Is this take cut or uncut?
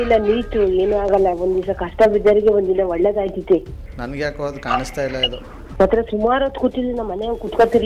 uncut